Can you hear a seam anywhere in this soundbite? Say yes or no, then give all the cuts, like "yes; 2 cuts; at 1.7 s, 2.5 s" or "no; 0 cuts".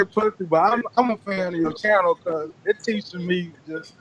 no; 0 cuts